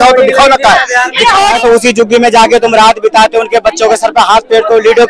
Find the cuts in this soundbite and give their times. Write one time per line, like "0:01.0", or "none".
0:01.6